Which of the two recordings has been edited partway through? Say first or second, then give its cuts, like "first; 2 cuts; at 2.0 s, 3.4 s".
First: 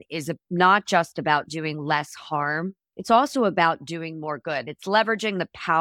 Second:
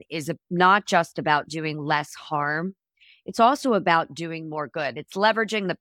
first; 1 cut; at 2.9 s